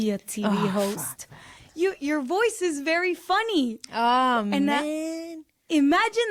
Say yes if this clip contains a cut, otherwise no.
no